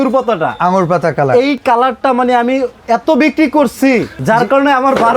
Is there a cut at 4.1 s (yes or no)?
yes